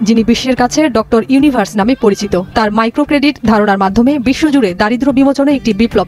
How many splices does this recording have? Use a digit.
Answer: 0